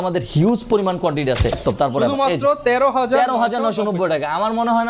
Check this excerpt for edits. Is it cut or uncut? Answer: cut